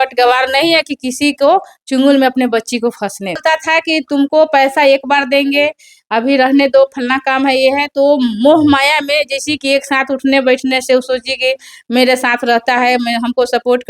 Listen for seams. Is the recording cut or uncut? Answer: cut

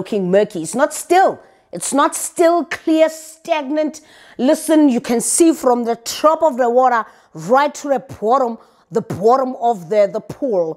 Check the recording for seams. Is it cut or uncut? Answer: uncut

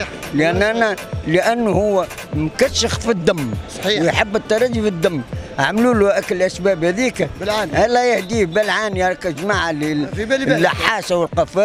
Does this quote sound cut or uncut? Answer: uncut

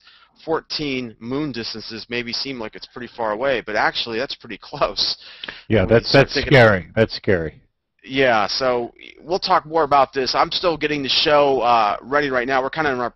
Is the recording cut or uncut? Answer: cut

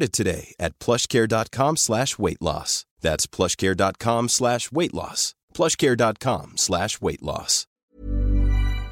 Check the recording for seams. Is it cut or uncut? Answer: cut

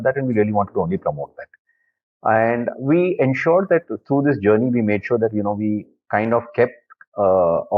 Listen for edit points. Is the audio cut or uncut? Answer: uncut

